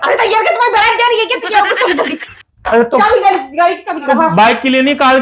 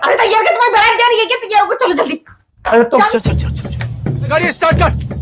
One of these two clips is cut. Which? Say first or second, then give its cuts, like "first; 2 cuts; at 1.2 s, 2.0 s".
first; 2 cuts; at 3.1 s, 4.1 s